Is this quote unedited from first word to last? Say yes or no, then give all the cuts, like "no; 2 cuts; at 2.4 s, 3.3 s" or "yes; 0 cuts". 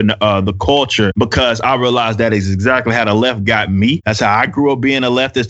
no; 2 cuts; at 1.1 s, 4.1 s